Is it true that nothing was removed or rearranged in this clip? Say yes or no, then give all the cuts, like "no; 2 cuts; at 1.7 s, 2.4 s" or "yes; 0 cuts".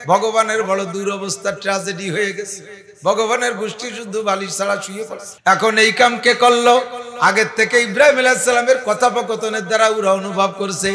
no; 1 cut; at 5.2 s